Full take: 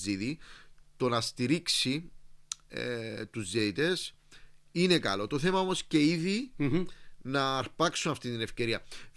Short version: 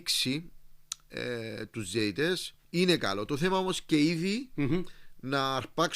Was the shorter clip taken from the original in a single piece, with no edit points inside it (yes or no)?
no